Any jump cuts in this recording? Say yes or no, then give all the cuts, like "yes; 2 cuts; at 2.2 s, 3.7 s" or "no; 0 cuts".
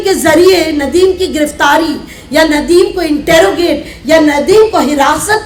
no; 0 cuts